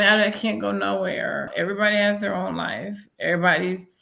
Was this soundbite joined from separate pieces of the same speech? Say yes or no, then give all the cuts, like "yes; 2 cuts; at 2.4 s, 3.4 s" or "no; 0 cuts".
yes; 1 cut; at 1.5 s